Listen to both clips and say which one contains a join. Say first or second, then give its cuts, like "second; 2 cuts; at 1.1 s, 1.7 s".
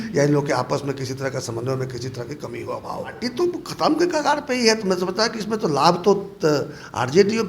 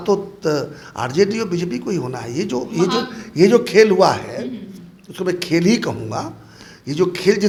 first; 1 cut; at 3.2 s